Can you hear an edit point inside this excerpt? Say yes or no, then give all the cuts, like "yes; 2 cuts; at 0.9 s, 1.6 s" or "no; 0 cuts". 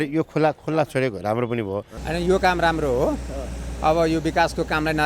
yes; 1 cut; at 1.9 s